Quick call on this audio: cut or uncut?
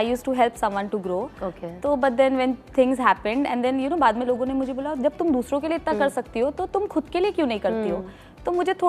uncut